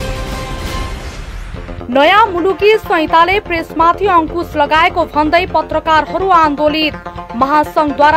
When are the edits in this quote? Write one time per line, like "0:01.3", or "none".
none